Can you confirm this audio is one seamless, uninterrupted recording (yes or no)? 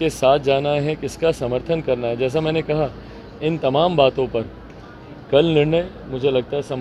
yes